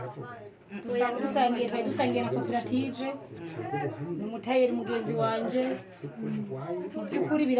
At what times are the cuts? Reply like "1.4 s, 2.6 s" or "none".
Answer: none